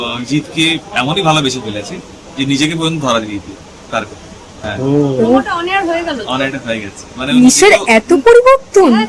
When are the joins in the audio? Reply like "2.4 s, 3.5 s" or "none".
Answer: none